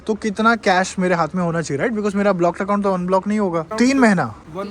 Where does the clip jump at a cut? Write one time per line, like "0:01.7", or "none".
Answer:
0:03.7